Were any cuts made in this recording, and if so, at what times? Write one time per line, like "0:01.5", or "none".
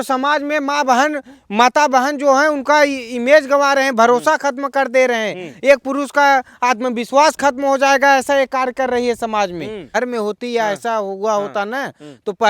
0:09.9